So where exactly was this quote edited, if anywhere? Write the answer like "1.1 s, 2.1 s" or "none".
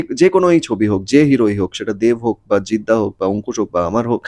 none